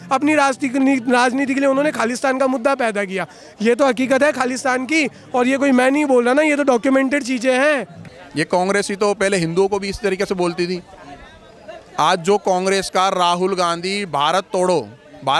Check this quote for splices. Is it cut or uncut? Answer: uncut